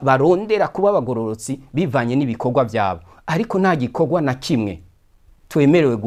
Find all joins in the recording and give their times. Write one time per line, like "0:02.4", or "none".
none